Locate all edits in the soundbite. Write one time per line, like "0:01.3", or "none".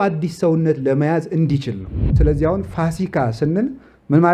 0:02.1